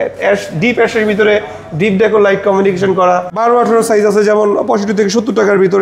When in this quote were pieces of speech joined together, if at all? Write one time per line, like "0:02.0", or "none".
0:03.3

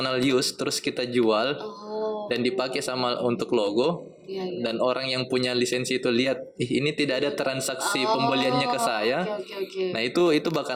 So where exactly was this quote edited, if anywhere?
none

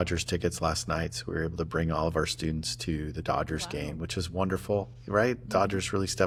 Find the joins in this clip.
none

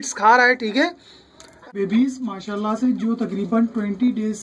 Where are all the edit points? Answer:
0:01.7

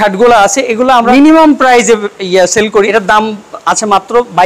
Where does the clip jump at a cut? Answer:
0:01.1
0:02.9

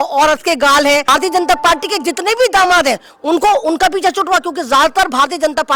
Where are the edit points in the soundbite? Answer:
0:01.1

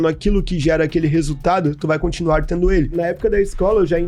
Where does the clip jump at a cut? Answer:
0:02.9

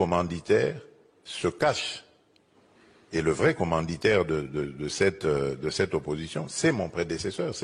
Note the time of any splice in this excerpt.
none

